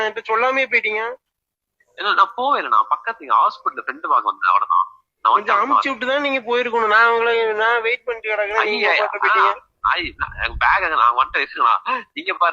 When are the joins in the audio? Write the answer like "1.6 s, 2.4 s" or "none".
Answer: none